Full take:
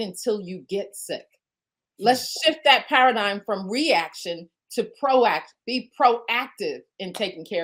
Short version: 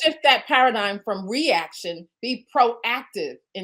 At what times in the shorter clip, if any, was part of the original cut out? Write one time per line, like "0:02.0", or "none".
0:02.1